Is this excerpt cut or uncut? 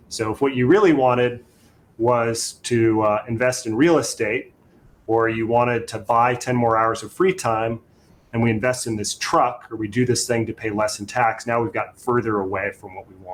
uncut